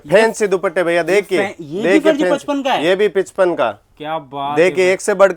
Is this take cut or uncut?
uncut